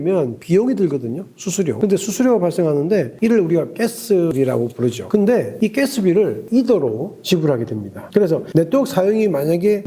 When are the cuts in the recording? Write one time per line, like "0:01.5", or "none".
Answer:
0:01.7